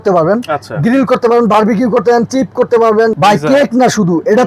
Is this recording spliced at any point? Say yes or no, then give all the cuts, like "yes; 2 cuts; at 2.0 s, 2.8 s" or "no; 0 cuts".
no; 0 cuts